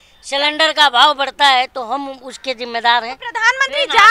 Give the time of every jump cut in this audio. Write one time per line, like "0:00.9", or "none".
none

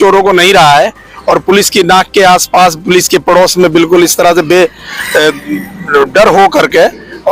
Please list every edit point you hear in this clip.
none

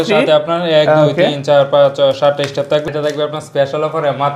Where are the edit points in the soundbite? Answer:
0:02.9

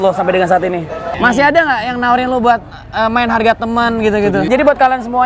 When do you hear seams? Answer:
0:01.0
0:04.5

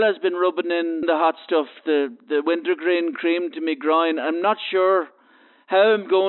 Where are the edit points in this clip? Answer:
0:01.0

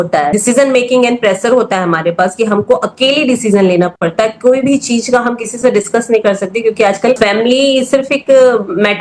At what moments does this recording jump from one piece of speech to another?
none

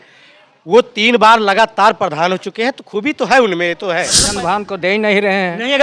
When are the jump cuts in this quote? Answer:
0:04.2

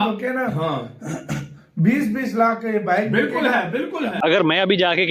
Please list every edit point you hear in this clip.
0:04.1

